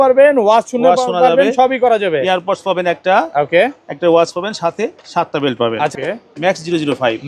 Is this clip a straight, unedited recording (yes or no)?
no